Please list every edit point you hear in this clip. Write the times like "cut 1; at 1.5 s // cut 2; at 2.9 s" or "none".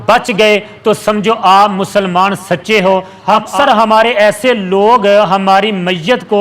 cut 1; at 3.4 s